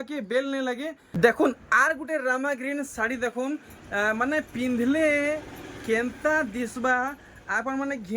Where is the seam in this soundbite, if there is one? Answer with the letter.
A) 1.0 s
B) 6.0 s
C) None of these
A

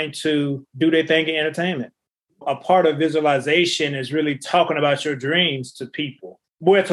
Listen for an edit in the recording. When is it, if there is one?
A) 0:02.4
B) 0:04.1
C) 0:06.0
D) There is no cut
A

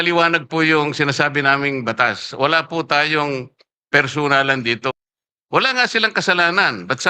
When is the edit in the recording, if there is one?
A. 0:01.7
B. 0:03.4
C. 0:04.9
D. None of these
C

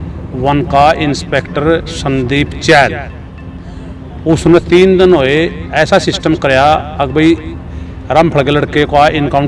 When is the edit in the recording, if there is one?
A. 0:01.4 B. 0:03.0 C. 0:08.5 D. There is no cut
D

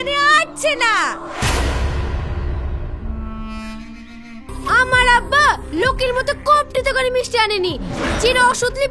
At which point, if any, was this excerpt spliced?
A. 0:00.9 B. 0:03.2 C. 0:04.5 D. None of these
C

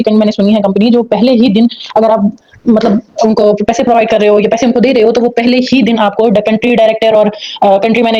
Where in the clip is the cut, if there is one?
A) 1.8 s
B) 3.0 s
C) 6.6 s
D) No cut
D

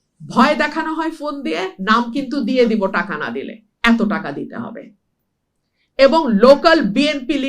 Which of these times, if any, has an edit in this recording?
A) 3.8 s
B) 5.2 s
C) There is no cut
C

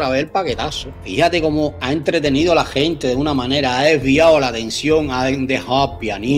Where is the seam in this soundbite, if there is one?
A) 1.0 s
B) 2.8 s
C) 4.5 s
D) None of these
A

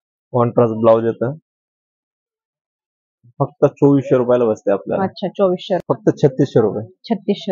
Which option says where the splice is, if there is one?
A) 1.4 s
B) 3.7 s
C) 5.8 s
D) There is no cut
C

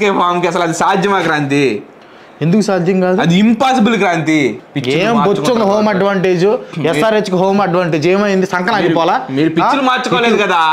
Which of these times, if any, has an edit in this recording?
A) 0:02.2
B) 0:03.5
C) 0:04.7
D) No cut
C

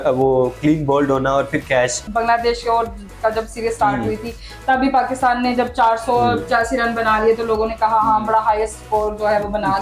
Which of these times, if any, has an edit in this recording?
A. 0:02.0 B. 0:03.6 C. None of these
A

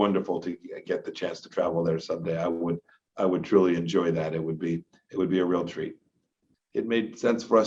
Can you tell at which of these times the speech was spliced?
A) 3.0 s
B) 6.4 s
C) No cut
B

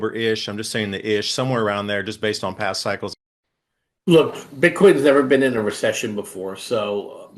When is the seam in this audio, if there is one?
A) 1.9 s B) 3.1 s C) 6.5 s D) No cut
B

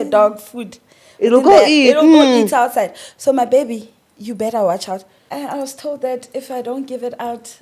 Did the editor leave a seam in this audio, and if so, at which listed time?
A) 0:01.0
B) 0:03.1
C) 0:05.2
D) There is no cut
C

